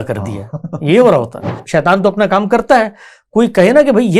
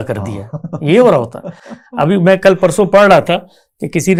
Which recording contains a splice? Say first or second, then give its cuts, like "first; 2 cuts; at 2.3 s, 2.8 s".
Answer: first; 1 cut; at 1.6 s